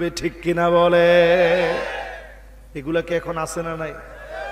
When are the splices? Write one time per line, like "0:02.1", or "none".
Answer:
none